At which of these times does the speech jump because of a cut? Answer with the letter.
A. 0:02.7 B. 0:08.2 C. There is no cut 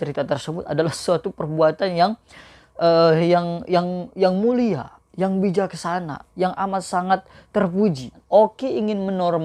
B